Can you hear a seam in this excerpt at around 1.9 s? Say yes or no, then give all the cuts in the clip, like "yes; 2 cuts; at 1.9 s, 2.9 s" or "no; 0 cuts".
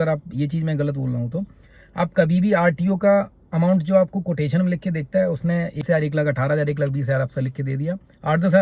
no; 1 cut; at 5.8 s